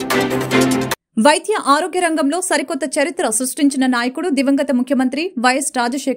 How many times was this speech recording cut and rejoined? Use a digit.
1